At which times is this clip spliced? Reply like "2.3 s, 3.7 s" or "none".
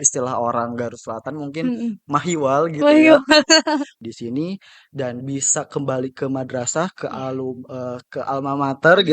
3.9 s